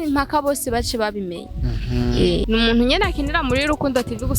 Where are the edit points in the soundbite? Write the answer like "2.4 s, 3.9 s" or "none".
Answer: 2.4 s